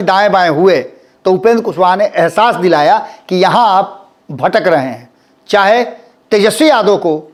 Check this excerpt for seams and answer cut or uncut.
uncut